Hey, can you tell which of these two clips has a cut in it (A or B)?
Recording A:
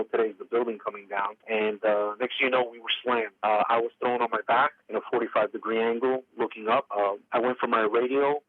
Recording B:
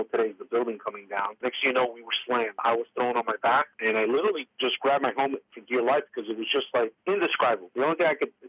B